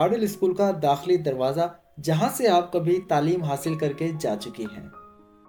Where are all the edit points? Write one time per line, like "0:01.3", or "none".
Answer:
none